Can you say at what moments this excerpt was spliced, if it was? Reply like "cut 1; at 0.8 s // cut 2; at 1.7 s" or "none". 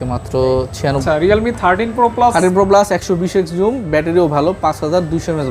cut 1; at 1.0 s

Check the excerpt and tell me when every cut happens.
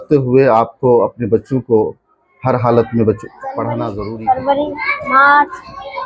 cut 1; at 3.8 s

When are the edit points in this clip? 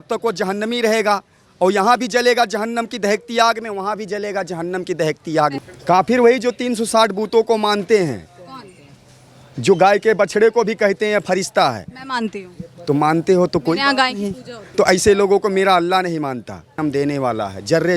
cut 1; at 5.6 s // cut 2; at 16.8 s

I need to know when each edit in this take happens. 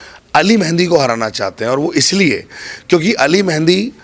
none

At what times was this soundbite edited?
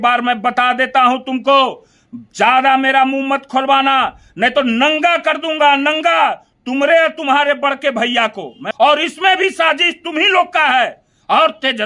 cut 1; at 8.6 s

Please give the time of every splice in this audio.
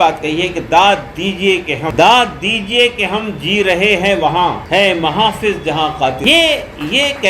cut 1; at 1.9 s // cut 2; at 4.6 s // cut 3; at 6.2 s

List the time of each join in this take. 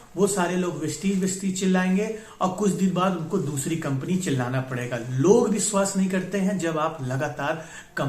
none

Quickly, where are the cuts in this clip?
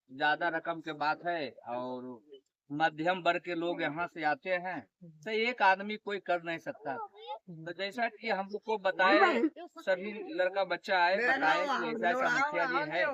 none

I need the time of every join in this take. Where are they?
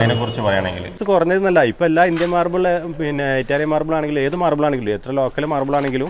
cut 1; at 0.9 s

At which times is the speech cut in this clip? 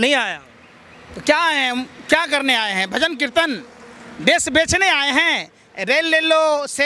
none

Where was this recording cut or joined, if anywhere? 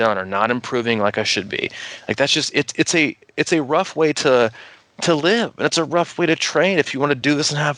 none

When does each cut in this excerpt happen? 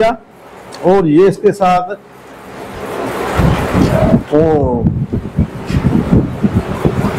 none

